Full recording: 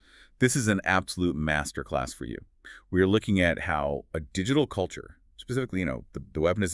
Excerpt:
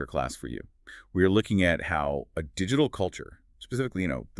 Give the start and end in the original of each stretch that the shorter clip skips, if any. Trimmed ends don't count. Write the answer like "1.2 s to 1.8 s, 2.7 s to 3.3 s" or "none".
none

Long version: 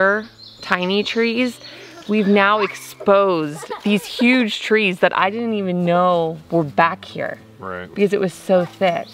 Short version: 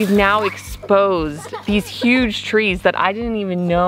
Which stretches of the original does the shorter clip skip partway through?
none

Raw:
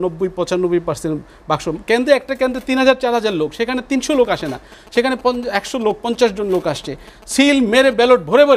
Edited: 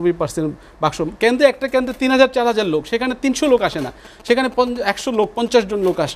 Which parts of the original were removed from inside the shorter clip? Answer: none

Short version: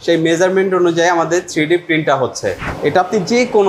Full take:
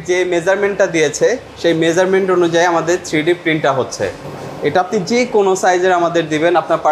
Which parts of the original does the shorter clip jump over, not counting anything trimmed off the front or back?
4.2 s to 4.5 s

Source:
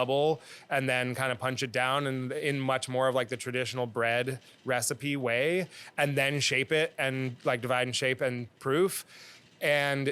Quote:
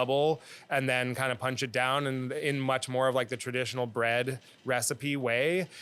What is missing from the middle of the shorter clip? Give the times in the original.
none

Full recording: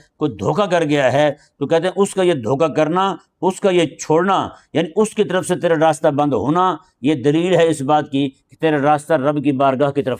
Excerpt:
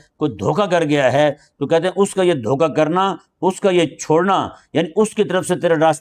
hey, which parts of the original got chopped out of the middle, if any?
none

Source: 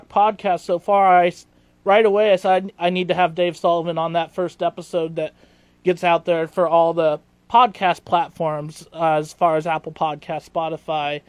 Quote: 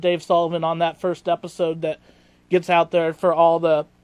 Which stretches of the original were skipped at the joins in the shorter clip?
none

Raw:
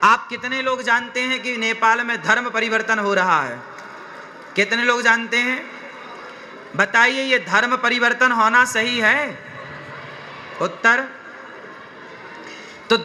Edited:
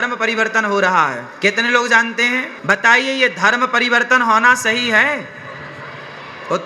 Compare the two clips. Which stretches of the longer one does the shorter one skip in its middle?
3.6 s to 4.4 s, 5.7 s to 6.6 s

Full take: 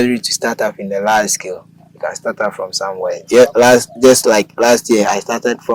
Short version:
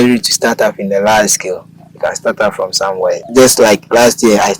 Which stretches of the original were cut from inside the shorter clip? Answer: 3.2 s to 3.9 s

